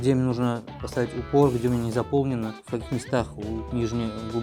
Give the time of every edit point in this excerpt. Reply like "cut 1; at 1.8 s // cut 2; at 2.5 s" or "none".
none